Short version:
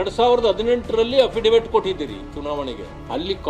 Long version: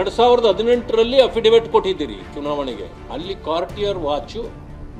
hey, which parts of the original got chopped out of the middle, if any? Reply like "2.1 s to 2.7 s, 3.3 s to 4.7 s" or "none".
none

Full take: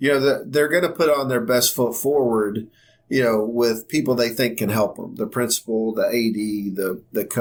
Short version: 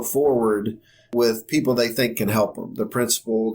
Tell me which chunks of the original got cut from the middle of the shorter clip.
3.0 s to 3.5 s

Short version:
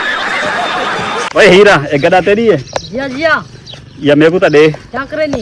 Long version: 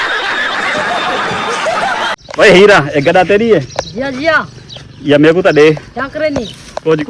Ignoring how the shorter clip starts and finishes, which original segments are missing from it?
1.6 s to 2.3 s

